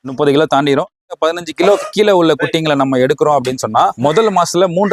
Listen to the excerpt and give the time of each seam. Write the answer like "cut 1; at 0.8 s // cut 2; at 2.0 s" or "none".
cut 1; at 1.0 s